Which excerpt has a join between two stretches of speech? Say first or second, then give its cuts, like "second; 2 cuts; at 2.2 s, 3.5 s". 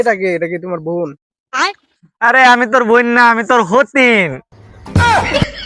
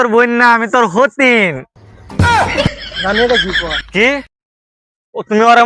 second; 1 cut; at 3.8 s